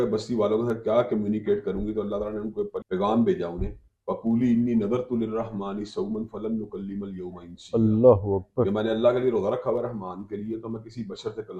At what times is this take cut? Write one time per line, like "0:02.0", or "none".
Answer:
0:02.8